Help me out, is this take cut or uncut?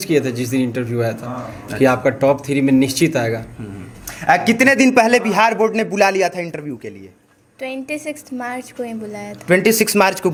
uncut